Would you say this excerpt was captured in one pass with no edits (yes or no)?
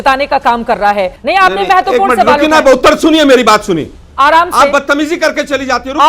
no